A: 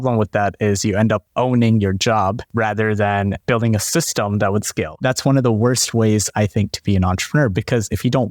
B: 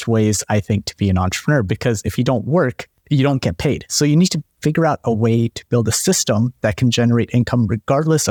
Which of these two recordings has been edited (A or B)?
A